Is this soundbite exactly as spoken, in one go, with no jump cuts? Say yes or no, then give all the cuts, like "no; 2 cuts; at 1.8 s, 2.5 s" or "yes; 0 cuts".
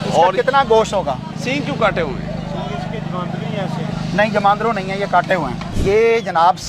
no; 2 cuts; at 1.3 s, 5.7 s